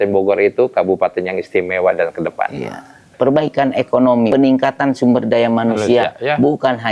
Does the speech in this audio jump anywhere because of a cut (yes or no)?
yes